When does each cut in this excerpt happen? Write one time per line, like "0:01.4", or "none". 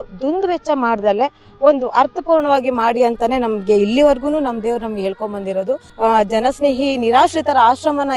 0:05.8